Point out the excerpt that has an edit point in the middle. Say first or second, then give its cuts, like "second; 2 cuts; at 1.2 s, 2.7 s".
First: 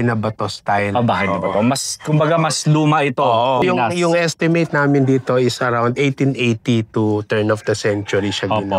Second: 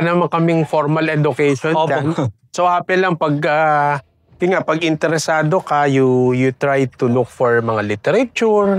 first; 1 cut; at 3.6 s